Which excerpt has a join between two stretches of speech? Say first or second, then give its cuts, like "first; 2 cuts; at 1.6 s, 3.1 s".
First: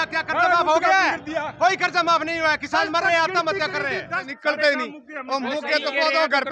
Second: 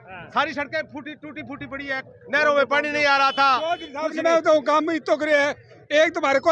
first; 1 cut; at 4.3 s